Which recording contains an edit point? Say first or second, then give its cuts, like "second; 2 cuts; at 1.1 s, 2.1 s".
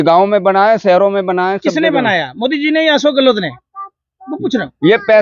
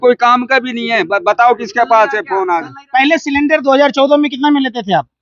second; 1 cut; at 2.8 s